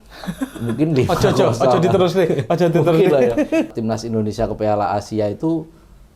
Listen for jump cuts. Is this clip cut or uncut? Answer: cut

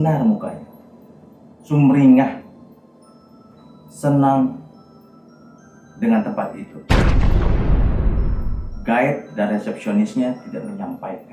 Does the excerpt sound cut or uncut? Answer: cut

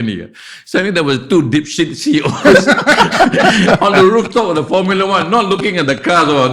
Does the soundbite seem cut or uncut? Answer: uncut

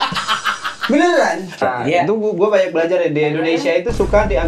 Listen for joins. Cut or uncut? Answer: cut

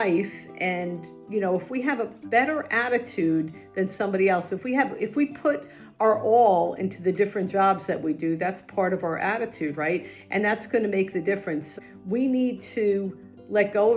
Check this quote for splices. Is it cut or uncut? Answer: cut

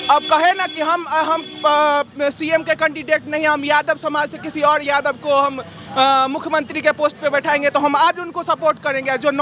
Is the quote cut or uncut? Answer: uncut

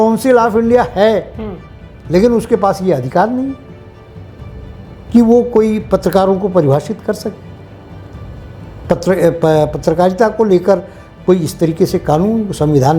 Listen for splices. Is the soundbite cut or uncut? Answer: uncut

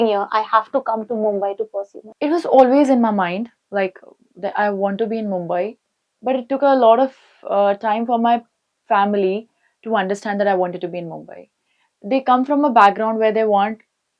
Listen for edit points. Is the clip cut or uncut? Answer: uncut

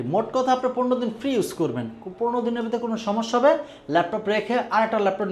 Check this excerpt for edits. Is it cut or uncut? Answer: uncut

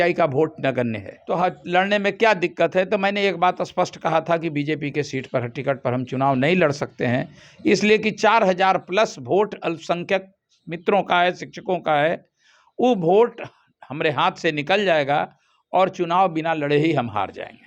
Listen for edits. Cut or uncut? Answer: cut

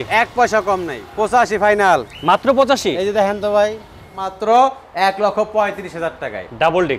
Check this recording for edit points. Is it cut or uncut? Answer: cut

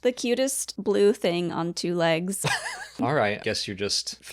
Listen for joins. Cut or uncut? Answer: cut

